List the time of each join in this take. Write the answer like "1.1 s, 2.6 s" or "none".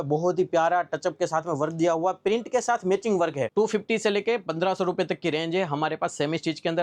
3.5 s